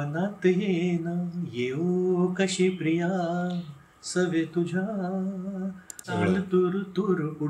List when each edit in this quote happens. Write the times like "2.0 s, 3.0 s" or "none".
6.1 s